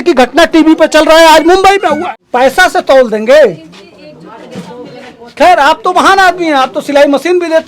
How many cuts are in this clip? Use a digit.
1